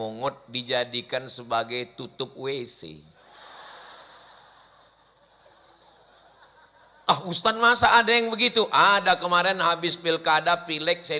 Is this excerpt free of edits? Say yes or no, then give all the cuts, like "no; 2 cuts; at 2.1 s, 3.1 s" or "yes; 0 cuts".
yes; 0 cuts